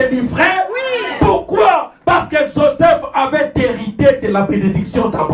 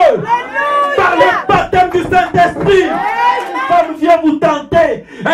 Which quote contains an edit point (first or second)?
second